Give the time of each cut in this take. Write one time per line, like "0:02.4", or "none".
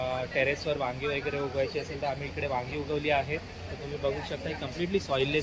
none